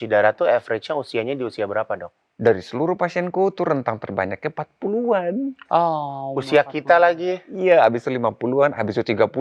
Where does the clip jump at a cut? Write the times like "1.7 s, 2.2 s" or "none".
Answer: none